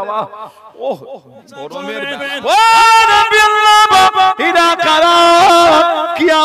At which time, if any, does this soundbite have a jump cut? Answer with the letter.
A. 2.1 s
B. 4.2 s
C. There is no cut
A